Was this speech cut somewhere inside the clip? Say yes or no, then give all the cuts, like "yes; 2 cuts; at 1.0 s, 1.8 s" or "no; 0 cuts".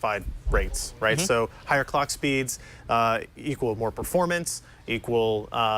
no; 0 cuts